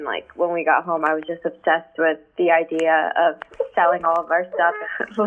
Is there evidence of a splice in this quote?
no; 0 cuts

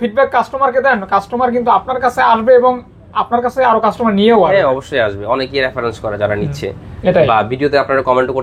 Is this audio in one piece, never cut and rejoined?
yes; 0 cuts

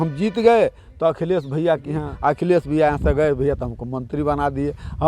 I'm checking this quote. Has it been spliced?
yes; 1 cut; at 2.1 s

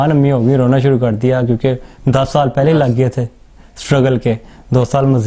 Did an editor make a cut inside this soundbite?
no; 0 cuts

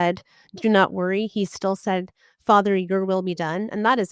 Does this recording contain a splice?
no; 0 cuts

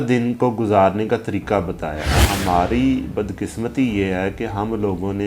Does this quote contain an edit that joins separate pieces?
yes; 1 cut; at 2.1 s

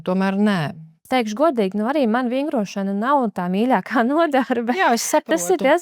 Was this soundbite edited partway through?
yes; 1 cut; at 0.9 s

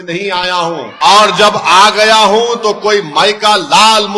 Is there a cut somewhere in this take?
yes; 1 cut; at 0.9 s

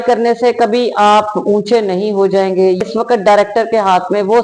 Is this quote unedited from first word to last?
no; 1 cut; at 2.8 s

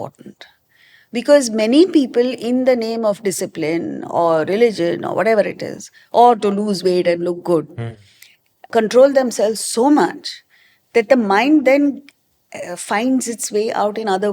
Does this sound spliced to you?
yes; 1 cut; at 8.6 s

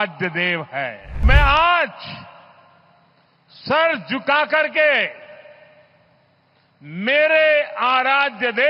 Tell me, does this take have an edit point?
yes; 1 cut; at 1.2 s

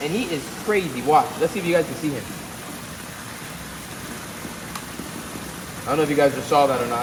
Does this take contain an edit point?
no; 0 cuts

